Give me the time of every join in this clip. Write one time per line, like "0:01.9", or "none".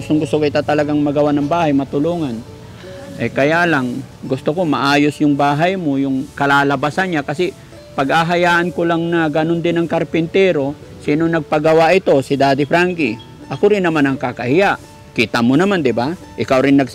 none